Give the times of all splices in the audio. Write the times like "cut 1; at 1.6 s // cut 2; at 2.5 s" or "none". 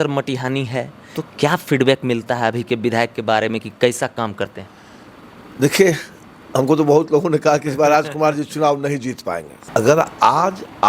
cut 1; at 1.0 s // cut 2; at 9.5 s